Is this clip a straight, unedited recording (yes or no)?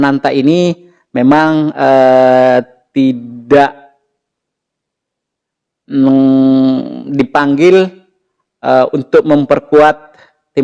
yes